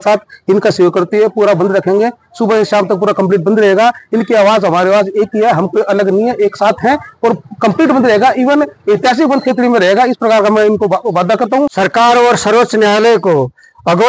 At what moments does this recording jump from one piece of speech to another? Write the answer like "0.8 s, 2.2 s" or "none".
11.7 s

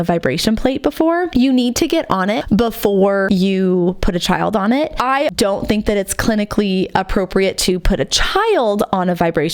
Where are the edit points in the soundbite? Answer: 1.3 s, 2.4 s, 3.3 s, 5.4 s

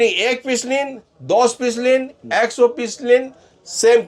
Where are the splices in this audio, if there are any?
none

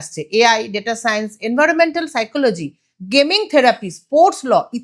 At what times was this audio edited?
none

